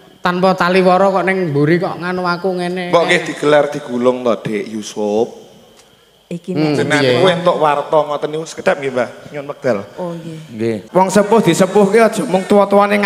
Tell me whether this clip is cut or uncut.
cut